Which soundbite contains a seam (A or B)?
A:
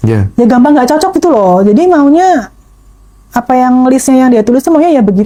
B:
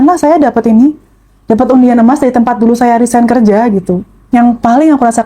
B